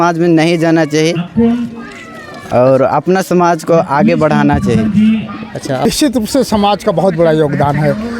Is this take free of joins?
no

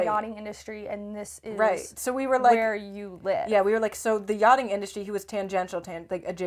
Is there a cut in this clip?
no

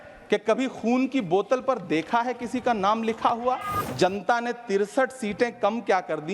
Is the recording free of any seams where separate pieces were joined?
no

